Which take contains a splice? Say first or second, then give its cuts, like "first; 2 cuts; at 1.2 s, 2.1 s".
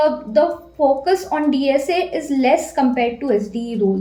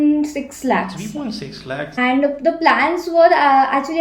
second; 1 cut; at 1.9 s